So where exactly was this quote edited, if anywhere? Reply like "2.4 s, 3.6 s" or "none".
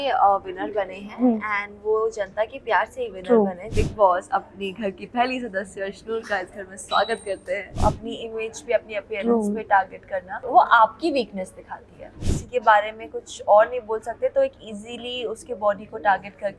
3.6 s, 7.8 s, 10.4 s, 12.3 s